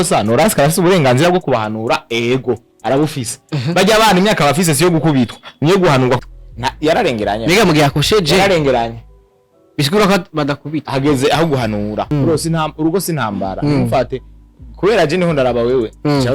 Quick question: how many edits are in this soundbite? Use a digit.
1